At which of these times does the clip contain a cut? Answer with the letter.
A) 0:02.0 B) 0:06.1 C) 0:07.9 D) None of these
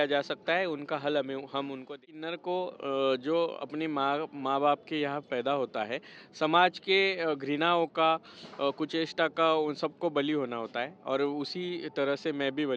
A